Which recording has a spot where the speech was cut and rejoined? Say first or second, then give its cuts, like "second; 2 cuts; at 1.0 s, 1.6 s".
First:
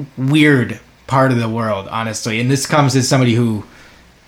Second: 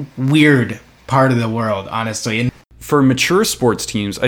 second; 1 cut; at 2.5 s